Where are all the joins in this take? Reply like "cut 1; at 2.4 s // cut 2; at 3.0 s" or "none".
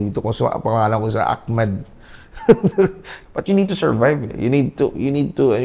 cut 1; at 3.1 s